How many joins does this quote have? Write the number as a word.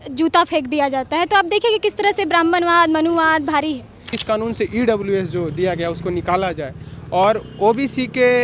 one